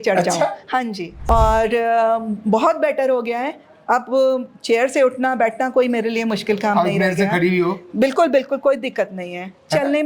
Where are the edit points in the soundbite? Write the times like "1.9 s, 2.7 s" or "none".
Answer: 1.1 s